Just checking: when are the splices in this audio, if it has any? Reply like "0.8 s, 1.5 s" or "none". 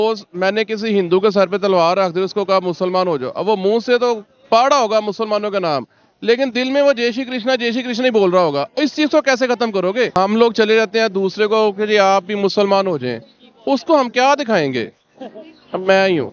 10.1 s